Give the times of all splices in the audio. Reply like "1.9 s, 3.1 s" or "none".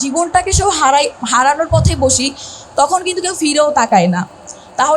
none

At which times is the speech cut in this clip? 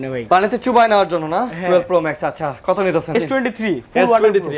3.1 s

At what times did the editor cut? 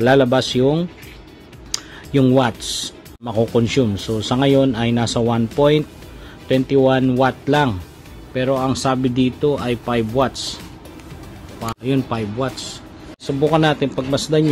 3.3 s, 11.7 s, 13.3 s

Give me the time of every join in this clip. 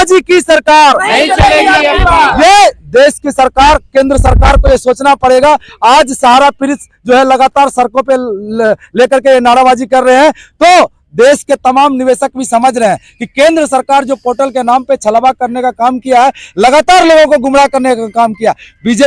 none

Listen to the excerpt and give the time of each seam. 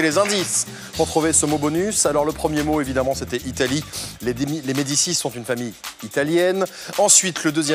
6.0 s

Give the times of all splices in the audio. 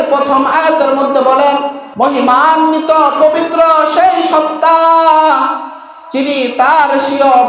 1.8 s

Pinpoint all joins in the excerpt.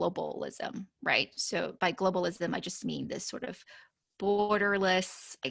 none

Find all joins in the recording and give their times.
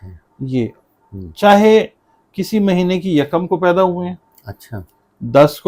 none

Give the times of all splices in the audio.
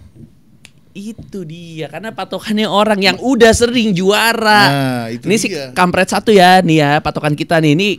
none

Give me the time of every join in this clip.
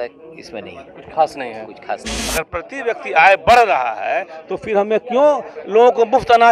2.2 s

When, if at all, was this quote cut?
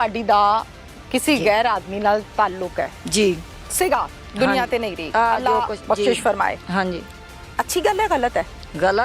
none

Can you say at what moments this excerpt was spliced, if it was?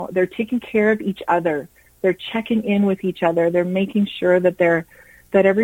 none

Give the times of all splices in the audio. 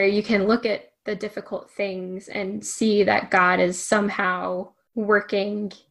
4.8 s

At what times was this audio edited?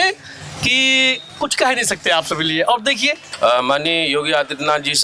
3.2 s

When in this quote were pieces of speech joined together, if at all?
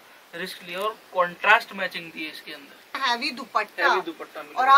3.0 s

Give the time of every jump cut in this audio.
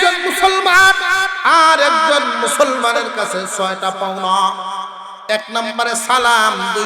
1.3 s

